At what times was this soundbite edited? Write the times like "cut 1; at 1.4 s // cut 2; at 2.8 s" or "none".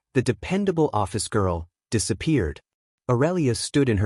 none